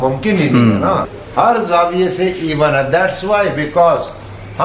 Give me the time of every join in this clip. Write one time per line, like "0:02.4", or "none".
0:01.2